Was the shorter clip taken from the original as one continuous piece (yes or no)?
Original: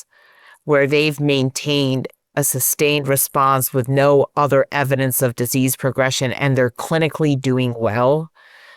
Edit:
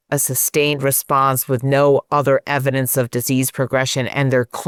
yes